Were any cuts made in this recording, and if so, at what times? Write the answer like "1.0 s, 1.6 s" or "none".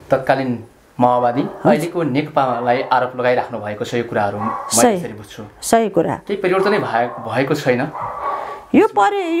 none